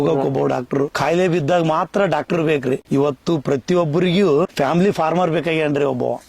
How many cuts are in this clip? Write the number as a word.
three